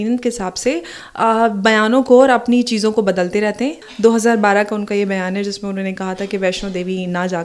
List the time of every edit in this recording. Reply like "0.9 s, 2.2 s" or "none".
3.8 s